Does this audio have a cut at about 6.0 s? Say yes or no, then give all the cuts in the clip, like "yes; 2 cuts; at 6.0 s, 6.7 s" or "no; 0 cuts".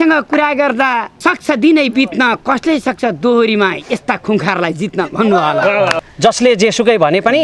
yes; 1 cut; at 6.0 s